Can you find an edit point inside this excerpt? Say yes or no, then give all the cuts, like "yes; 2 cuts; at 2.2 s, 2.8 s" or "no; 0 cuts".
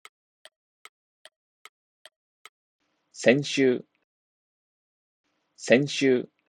no; 0 cuts